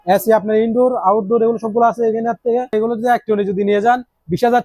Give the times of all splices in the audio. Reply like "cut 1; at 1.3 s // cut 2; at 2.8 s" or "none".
cut 1; at 2.7 s